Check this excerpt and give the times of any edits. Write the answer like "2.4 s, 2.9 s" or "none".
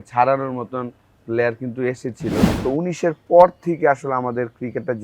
2.5 s